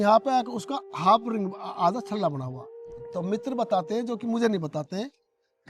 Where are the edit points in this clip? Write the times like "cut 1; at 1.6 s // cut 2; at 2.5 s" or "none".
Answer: cut 1; at 3.2 s

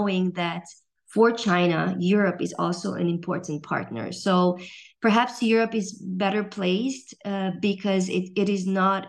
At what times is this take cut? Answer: none

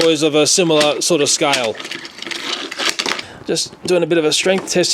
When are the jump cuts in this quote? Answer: cut 1; at 3.0 s

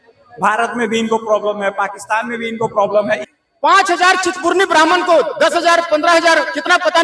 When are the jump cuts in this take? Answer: cut 1; at 3.2 s

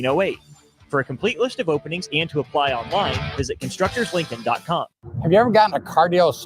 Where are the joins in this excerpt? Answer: cut 1; at 5.0 s

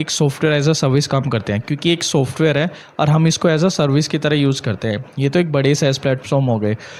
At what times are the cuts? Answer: none

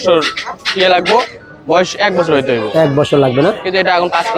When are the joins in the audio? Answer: none

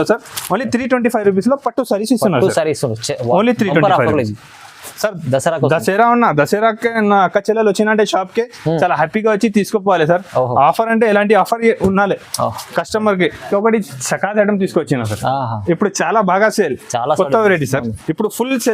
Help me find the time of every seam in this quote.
cut 1; at 13.4 s

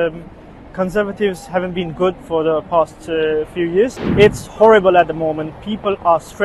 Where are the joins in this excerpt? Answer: cut 1; at 4.0 s

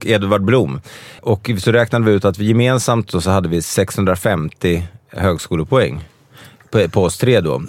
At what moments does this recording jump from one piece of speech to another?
cut 1; at 1.2 s

